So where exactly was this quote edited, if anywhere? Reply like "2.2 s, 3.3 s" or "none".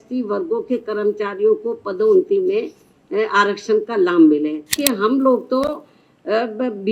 4.8 s